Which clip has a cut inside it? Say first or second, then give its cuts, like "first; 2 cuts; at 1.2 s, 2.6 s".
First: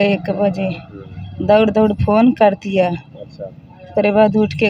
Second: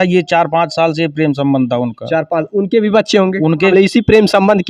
second; 1 cut; at 3.7 s